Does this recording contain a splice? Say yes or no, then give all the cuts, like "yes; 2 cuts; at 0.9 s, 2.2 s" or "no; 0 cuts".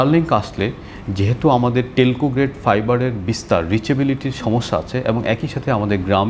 no; 0 cuts